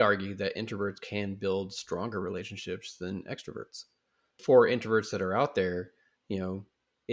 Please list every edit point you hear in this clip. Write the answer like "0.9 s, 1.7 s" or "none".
4.4 s